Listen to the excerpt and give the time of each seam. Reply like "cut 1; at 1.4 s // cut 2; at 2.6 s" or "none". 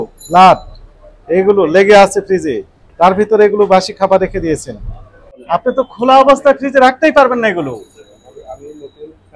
cut 1; at 5.3 s